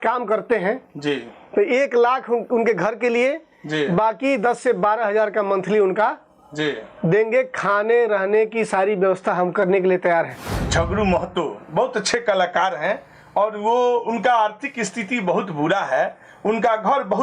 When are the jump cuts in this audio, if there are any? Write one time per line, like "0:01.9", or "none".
0:10.5